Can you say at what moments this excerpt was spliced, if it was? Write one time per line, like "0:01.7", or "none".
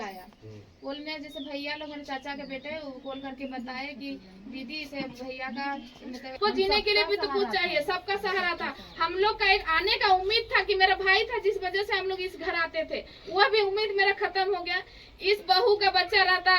0:06.3